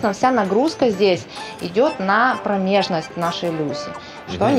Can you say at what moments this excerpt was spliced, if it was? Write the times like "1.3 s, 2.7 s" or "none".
none